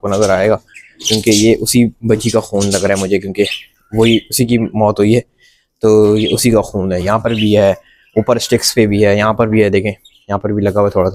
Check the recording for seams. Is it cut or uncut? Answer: uncut